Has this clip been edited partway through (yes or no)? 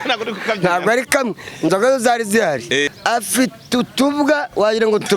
yes